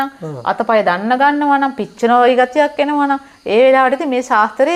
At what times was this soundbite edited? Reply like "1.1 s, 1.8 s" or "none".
none

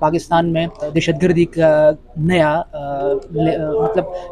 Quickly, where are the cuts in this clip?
1.0 s

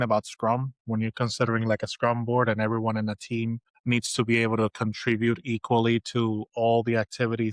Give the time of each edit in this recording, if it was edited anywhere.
3.7 s

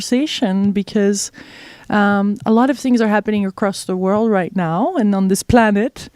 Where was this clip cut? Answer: 2.9 s

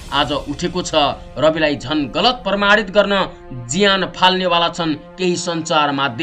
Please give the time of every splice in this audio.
1.2 s

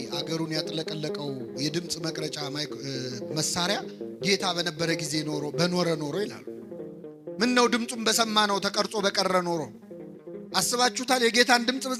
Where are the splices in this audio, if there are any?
none

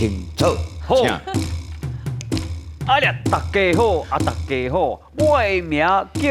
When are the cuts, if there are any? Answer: none

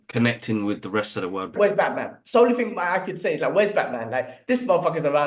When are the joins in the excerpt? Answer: 1.5 s

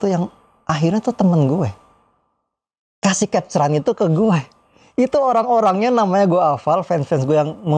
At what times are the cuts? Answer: none

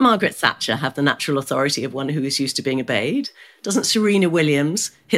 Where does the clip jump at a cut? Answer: none

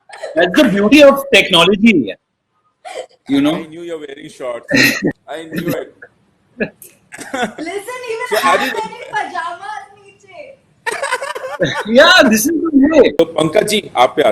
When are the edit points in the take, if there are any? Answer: 13.2 s

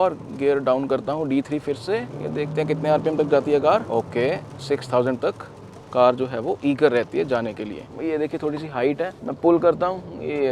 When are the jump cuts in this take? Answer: 7.9 s

